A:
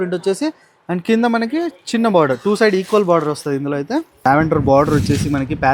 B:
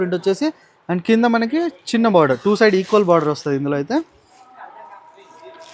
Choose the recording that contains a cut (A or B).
A